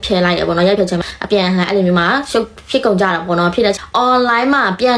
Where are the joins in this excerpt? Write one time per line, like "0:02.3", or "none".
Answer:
0:00.9
0:03.8